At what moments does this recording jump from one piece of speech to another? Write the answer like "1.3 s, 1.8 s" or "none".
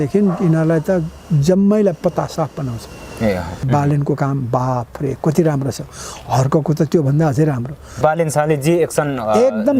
3.7 s, 8.0 s